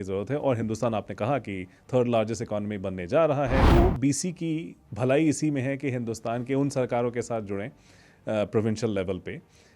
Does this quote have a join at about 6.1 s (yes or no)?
no